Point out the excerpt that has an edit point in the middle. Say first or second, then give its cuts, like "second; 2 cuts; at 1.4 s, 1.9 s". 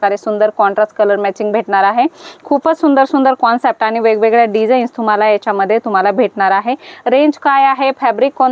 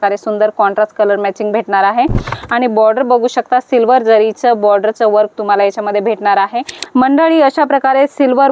second; 2 cuts; at 2.3 s, 6.7 s